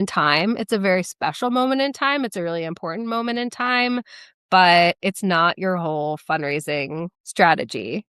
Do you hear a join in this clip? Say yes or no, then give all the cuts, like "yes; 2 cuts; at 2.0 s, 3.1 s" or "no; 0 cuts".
no; 0 cuts